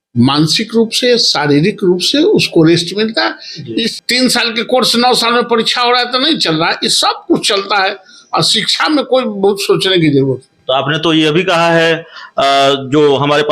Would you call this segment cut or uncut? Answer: cut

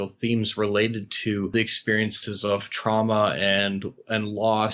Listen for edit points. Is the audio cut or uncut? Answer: cut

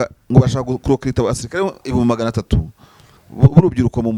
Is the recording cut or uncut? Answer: uncut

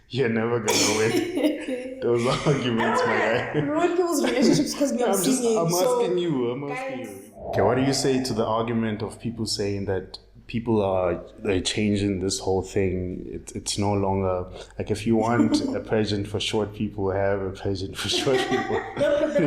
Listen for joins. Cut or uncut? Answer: cut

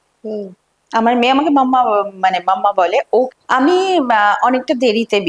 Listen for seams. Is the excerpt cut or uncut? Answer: cut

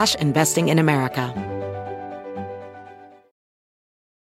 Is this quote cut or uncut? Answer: cut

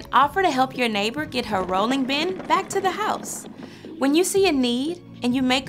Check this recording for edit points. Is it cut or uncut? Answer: uncut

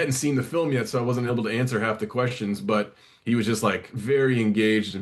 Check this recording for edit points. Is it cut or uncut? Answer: uncut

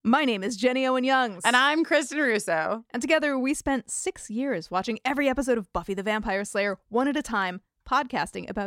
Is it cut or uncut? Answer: uncut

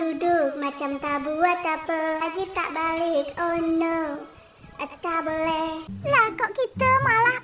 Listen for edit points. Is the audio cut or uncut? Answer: cut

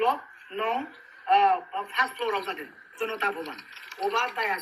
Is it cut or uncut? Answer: uncut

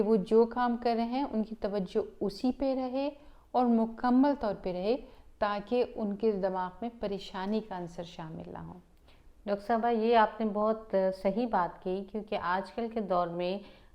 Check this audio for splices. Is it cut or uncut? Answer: uncut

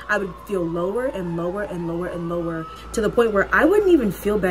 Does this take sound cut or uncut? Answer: cut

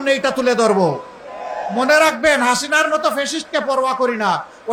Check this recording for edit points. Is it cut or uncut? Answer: uncut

